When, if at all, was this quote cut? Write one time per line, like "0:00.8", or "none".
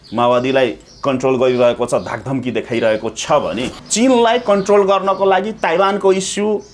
0:03.7